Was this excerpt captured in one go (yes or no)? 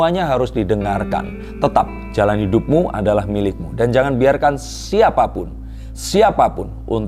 yes